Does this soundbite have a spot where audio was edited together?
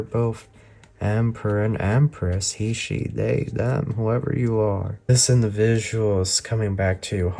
yes; 1 cut; at 5.1 s

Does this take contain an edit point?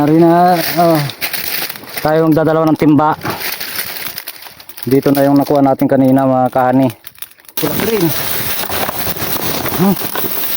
yes; 1 cut; at 7.6 s

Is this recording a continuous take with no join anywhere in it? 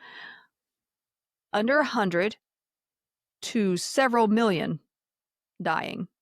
yes; 0 cuts

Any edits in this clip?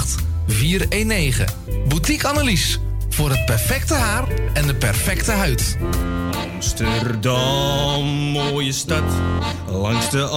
yes; 1 cut; at 5.8 s

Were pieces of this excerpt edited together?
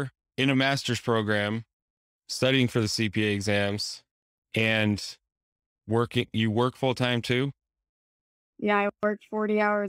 no; 0 cuts

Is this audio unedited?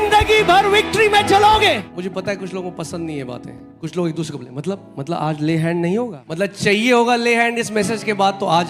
no; 3 cuts; at 1.8 s, 3.6 s, 6.2 s

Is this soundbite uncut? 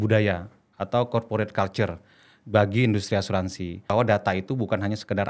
no; 1 cut; at 3.9 s

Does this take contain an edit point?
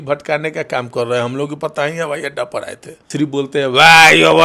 yes; 1 cut; at 2.9 s

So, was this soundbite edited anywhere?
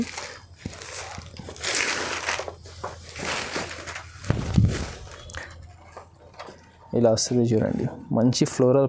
no; 0 cuts

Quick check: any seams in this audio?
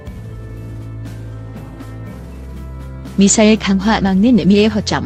no; 0 cuts

